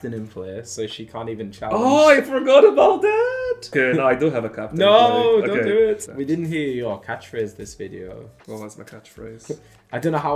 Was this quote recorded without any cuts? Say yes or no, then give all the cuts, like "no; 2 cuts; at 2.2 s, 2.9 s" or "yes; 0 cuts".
no; 2 cuts; at 3.7 s, 6.0 s